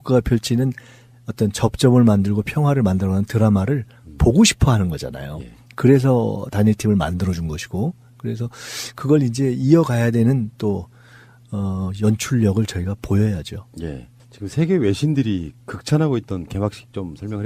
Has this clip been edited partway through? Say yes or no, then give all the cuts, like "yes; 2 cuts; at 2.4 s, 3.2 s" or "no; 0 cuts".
yes; 1 cut; at 7.3 s